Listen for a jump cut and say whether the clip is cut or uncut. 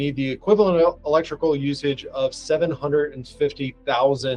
uncut